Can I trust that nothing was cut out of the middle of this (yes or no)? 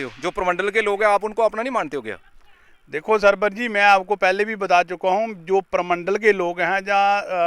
yes